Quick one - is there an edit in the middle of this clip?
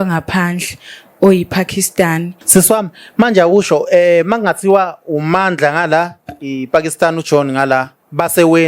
yes; 1 cut; at 2.3 s

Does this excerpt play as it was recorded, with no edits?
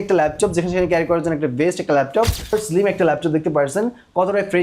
no; 1 cut; at 2.5 s

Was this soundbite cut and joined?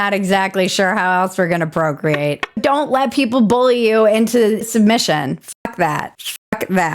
yes; 2 cuts; at 2.6 s, 4.6 s

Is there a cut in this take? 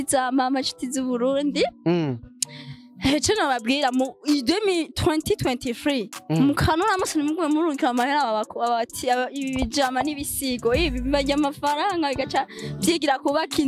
no; 0 cuts

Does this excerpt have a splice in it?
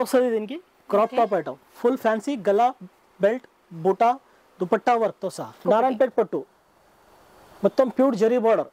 yes; 1 cut; at 5.6 s

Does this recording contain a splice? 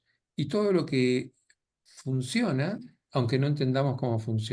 no; 0 cuts

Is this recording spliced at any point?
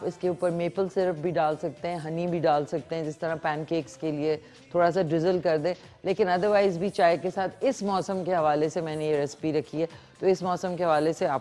no; 0 cuts

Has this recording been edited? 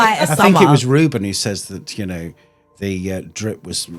no; 0 cuts

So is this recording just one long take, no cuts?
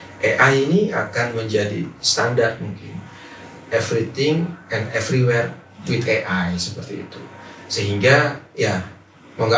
yes; 0 cuts

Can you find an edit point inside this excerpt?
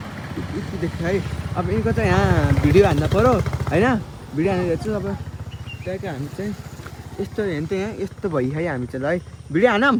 no; 0 cuts

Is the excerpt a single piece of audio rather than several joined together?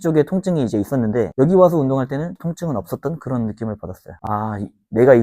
no; 2 cuts; at 1.3 s, 4.2 s

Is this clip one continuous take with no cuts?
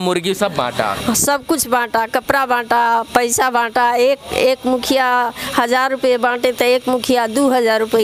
yes; 0 cuts

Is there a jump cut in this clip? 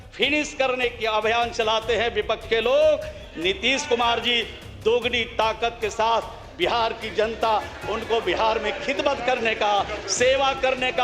no; 0 cuts

